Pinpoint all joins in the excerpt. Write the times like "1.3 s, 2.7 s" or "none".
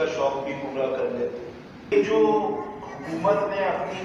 1.9 s